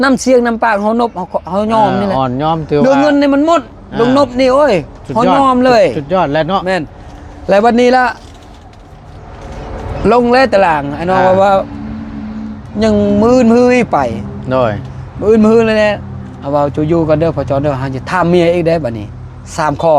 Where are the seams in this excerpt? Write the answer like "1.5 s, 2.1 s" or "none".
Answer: none